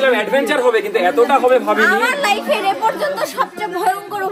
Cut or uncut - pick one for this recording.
uncut